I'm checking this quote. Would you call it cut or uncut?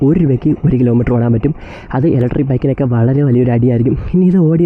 uncut